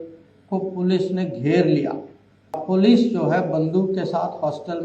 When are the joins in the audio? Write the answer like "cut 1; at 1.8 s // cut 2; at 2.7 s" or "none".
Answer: cut 1; at 2.6 s